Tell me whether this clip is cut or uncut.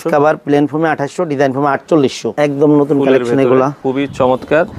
cut